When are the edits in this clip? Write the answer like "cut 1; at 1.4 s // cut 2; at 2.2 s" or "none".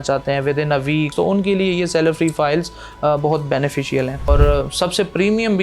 cut 1; at 1.1 s // cut 2; at 4.3 s

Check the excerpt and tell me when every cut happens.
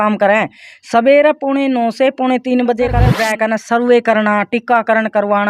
cut 1; at 3.1 s

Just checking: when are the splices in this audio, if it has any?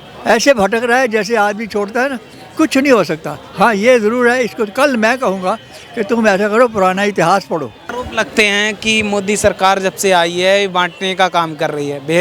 cut 1; at 7.9 s

